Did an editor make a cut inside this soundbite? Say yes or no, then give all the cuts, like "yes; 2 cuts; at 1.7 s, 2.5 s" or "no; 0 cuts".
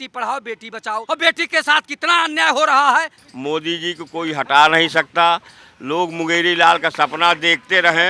yes; 2 cuts; at 1.0 s, 3.2 s